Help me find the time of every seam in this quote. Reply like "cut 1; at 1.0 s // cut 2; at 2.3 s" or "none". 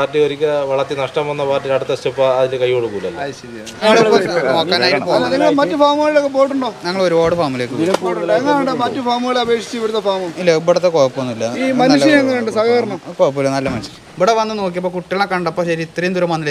cut 1; at 3.8 s // cut 2; at 13.9 s